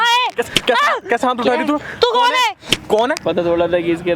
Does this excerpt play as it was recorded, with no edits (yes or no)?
no